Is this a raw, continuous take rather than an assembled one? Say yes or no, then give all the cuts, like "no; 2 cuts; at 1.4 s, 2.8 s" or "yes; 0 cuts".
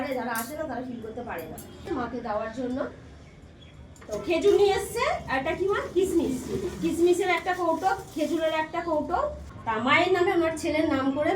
no; 2 cuts; at 1.8 s, 9.5 s